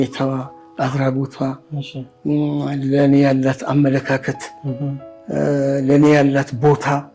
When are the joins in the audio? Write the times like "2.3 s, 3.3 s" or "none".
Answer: none

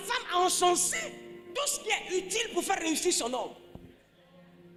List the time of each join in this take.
none

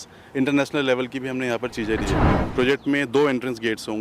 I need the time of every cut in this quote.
2.4 s

